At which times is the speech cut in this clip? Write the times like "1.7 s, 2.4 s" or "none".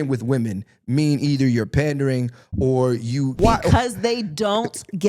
3.4 s